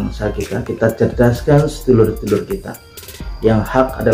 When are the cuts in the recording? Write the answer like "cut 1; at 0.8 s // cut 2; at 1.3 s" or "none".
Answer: none